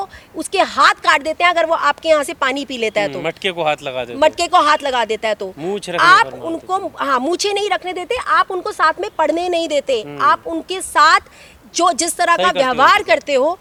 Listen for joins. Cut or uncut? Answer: uncut